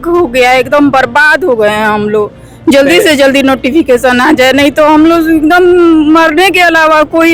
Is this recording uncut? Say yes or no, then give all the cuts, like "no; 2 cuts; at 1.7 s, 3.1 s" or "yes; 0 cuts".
yes; 0 cuts